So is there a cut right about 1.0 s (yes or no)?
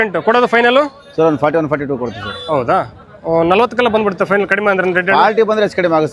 no